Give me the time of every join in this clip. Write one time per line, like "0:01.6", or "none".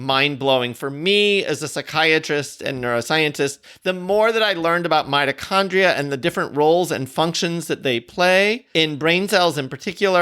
0:08.6